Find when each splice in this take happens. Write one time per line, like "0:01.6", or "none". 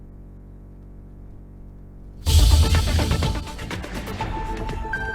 none